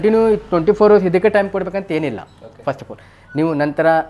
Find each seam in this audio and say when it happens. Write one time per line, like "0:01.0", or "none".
none